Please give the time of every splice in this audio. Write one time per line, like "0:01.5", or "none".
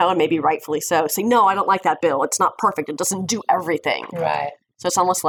none